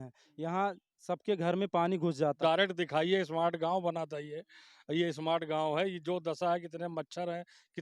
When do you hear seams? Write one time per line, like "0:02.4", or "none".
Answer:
0:02.4